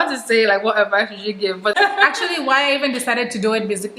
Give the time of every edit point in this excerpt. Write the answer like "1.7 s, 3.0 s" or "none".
1.7 s